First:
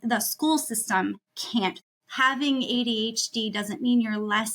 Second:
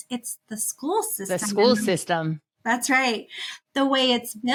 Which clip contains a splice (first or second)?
first